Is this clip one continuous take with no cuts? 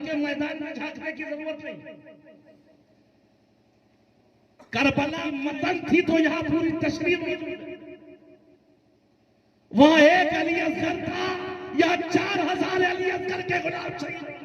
no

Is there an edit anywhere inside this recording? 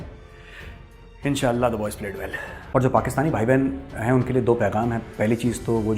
yes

